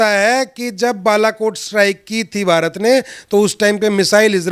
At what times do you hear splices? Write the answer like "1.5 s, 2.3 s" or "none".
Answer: none